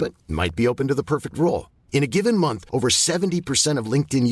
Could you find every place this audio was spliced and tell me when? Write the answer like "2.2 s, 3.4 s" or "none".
none